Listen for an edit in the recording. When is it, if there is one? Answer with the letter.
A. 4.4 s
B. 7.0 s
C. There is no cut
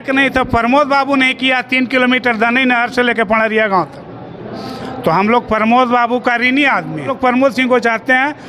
C